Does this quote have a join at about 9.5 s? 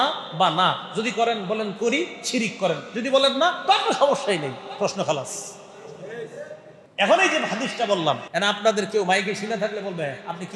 no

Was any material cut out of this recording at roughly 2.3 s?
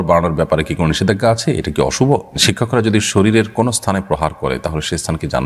yes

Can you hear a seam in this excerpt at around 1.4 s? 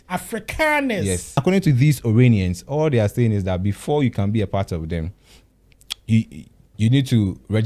yes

